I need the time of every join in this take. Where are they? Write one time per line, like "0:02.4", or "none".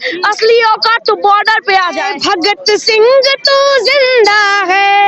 0:02.2